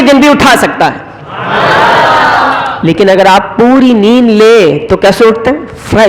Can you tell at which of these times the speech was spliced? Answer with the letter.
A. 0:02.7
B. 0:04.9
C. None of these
A